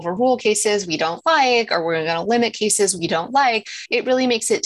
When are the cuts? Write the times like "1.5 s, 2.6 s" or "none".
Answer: none